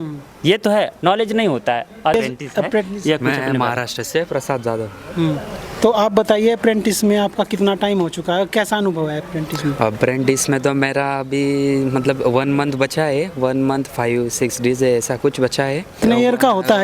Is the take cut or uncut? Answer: cut